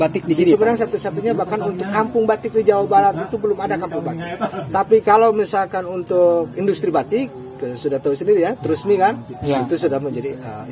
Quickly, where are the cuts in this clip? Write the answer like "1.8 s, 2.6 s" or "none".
none